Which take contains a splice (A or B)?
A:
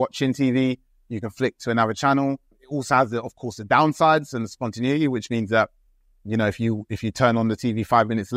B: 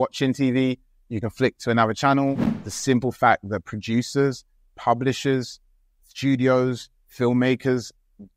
B